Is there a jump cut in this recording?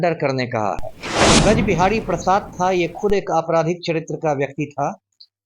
yes; 1 cut; at 1.4 s

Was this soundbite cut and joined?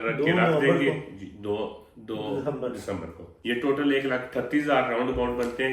yes; 1 cut; at 3.3 s

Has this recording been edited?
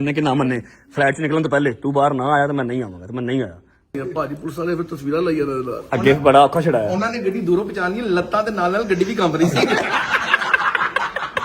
yes; 2 cuts; at 4.0 s, 9.9 s

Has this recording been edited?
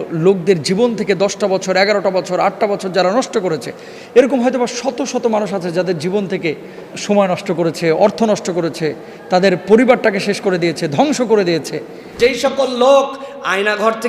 yes; 1 cut; at 12.1 s

